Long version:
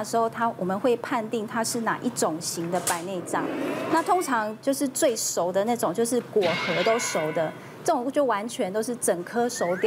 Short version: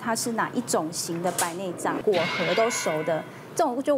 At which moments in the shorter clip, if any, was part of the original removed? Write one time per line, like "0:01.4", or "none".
0:02.0